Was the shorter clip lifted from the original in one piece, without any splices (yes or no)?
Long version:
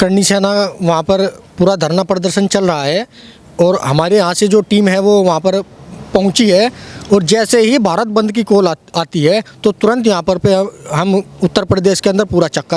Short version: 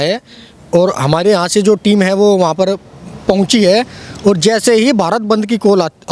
yes